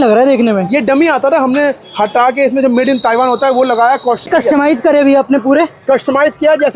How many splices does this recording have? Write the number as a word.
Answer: one